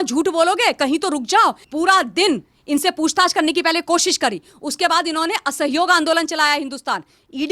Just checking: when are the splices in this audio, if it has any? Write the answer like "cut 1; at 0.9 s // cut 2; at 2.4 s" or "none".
cut 1; at 1.6 s